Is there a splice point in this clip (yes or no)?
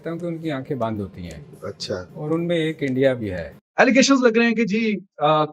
yes